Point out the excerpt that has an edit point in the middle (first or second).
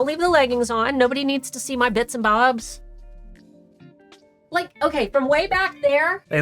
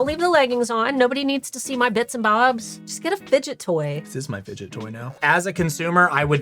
second